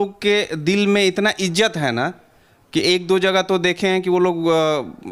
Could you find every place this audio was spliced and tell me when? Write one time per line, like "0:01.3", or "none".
none